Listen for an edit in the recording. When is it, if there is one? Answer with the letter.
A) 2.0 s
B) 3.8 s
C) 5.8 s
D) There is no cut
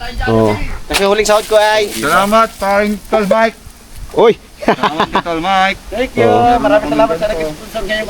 A